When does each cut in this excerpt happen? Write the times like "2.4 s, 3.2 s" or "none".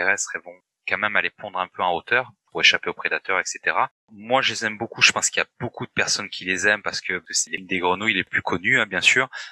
4.1 s